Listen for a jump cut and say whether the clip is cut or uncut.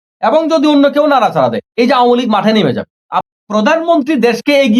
cut